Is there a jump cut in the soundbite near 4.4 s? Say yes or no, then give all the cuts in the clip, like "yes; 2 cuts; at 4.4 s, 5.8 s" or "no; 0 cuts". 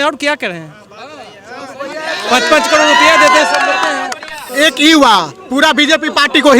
yes; 1 cut; at 4.4 s